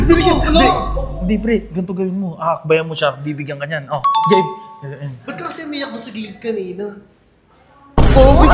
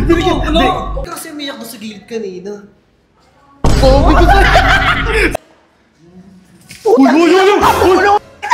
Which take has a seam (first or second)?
second